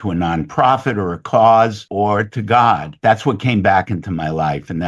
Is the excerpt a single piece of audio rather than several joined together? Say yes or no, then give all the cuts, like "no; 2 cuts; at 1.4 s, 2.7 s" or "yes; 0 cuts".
no; 2 cuts; at 1.8 s, 2.9 s